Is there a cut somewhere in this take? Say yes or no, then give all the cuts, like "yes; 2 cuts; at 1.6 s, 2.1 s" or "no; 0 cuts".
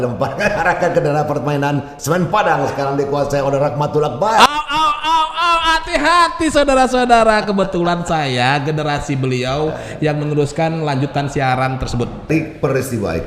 yes; 1 cut; at 12.2 s